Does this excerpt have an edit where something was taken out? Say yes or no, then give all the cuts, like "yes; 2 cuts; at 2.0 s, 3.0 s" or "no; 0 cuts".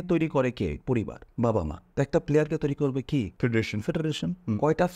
yes; 3 cuts; at 1.2 s, 1.8 s, 3.3 s